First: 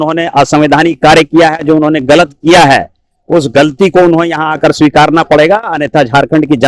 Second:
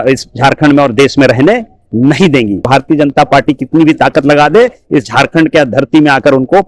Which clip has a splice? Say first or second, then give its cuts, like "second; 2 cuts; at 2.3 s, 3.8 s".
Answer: second; 1 cut; at 2.6 s